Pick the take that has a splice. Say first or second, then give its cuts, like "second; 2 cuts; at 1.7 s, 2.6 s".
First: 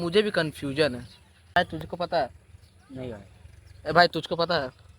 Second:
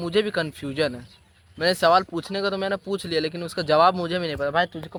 first; 1 cut; at 1.6 s